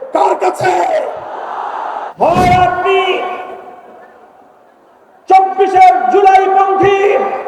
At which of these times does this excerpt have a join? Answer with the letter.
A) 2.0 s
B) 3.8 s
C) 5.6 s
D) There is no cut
A